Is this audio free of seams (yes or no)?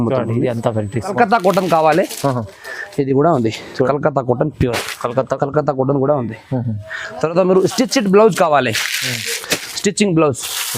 no